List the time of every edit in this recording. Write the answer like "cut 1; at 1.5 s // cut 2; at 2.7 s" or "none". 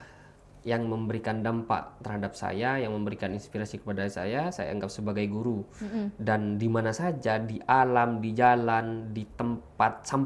none